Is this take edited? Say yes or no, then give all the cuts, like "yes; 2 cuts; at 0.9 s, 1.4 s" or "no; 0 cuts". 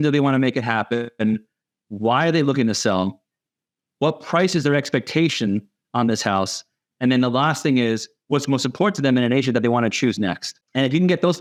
no; 0 cuts